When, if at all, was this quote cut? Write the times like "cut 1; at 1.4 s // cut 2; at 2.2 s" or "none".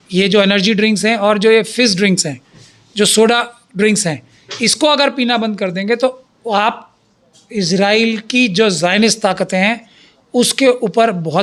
none